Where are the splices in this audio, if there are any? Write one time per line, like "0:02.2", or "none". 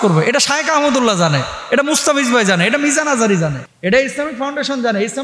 0:03.7